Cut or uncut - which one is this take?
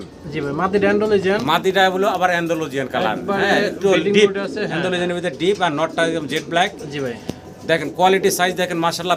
uncut